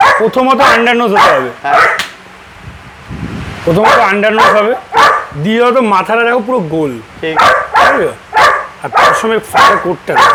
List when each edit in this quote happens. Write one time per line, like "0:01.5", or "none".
none